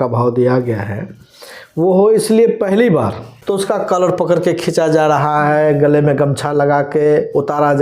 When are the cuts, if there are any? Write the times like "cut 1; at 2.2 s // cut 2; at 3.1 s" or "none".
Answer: cut 1; at 3.3 s

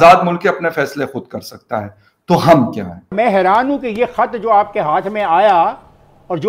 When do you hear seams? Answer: cut 1; at 3.1 s

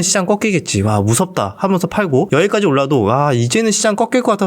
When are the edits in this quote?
cut 1; at 2.3 s

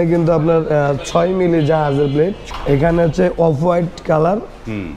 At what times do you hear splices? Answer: cut 1; at 2.5 s

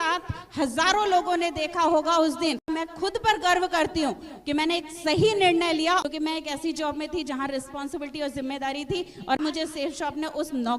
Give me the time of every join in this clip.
cut 1; at 2.6 s // cut 2; at 6.0 s // cut 3; at 9.4 s

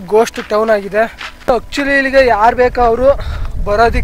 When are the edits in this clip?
cut 1; at 1.3 s

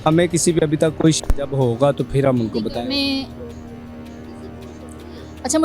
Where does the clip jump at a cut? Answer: none

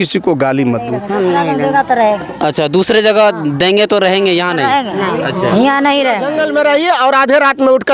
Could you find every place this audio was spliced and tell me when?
cut 1; at 1.0 s // cut 2; at 6.3 s

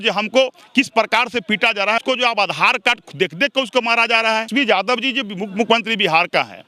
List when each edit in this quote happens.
cut 1; at 2.0 s // cut 2; at 4.5 s

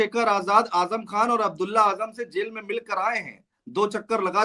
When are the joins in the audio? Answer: none

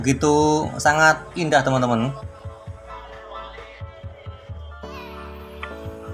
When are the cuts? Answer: none

